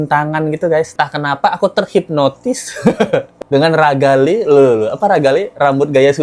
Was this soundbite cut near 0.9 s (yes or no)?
yes